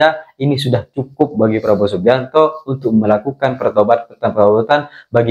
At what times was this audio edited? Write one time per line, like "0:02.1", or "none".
none